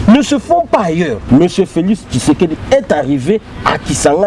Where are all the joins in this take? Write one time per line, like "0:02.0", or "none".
0:01.2